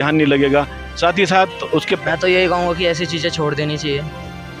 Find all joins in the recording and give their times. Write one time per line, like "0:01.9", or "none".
0:02.0